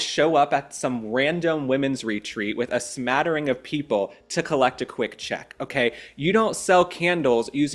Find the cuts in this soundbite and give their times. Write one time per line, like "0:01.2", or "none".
none